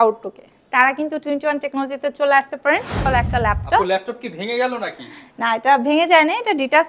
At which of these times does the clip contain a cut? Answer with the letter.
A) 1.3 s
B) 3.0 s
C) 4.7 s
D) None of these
B